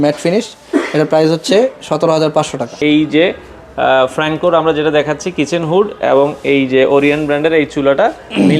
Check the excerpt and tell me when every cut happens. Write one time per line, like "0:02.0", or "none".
0:02.8